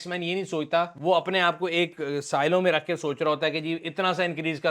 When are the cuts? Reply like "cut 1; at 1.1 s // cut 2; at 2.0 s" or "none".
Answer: cut 1; at 0.9 s